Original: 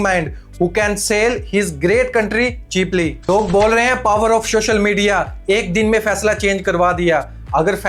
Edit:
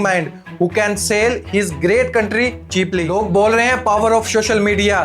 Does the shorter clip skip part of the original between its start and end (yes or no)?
yes